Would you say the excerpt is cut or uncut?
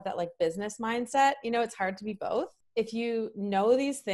cut